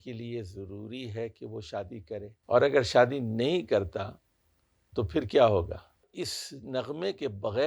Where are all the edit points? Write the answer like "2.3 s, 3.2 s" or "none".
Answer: 6.0 s